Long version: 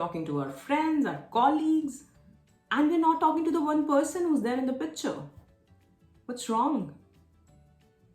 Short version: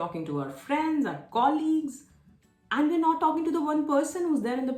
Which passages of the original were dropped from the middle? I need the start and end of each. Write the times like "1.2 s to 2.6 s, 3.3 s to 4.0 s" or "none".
none